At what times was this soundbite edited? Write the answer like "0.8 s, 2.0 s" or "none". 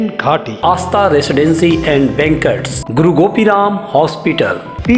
none